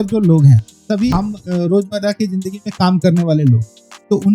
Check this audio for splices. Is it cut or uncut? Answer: cut